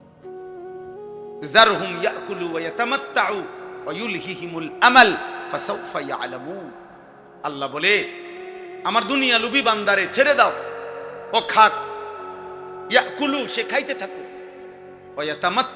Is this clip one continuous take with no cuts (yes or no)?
no